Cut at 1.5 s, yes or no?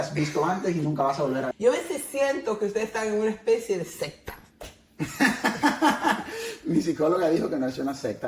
yes